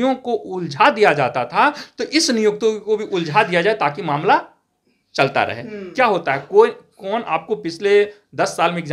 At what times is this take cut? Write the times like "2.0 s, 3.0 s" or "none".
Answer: none